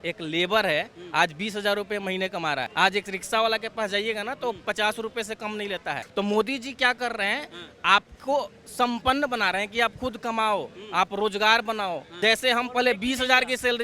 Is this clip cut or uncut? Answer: cut